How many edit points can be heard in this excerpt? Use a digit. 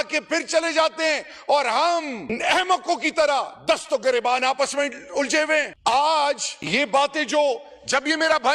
0